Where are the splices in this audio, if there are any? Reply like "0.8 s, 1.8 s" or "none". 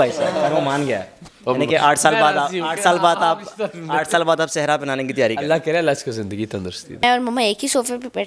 7.0 s